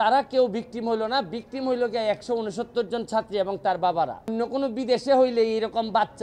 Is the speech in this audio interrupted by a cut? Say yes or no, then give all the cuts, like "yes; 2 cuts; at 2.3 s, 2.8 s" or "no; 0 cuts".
yes; 1 cut; at 4.3 s